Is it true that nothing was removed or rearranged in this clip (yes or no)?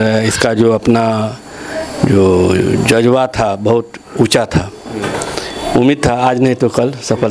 yes